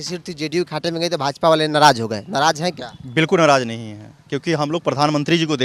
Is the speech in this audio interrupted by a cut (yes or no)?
no